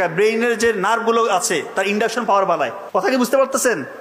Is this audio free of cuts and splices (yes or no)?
no